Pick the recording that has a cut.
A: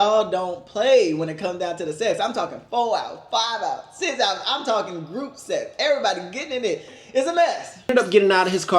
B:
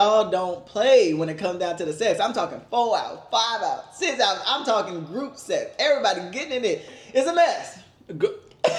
A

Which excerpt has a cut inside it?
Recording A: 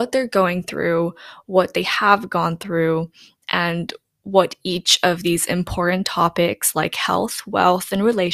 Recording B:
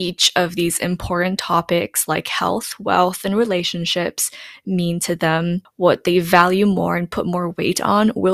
B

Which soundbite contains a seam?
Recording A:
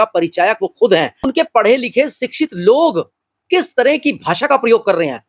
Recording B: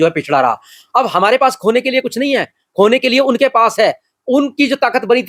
A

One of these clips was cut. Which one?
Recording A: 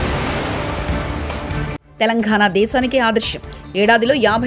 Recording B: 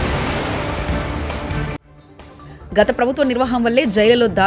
A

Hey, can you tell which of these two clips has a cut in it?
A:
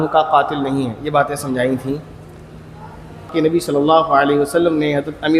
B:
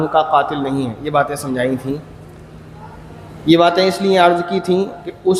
A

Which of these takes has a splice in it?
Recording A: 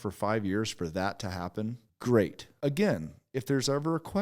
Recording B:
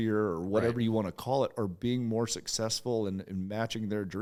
A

